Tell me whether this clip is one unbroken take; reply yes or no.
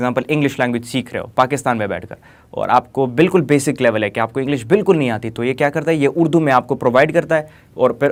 yes